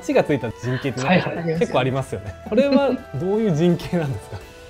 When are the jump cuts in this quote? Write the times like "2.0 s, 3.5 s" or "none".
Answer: 2.4 s